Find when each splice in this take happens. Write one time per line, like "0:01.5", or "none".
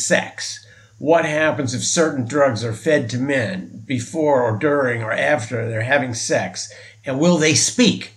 none